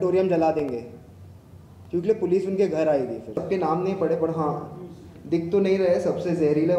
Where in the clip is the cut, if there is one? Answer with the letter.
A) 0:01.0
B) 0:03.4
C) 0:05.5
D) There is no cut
B